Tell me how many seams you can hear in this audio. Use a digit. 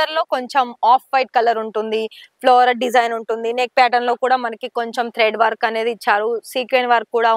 0